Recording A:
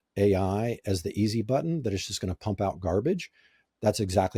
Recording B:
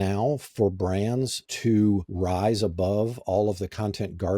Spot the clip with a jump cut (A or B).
B